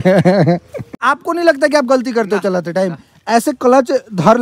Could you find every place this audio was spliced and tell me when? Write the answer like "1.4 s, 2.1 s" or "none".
0.9 s